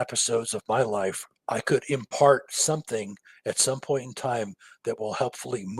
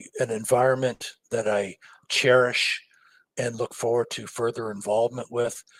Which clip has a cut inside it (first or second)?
first